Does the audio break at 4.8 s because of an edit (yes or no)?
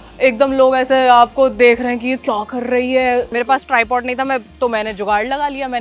no